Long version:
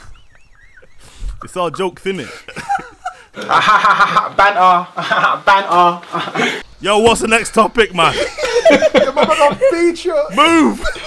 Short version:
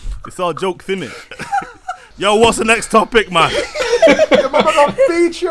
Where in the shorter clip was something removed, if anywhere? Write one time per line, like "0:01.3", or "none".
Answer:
0:02.0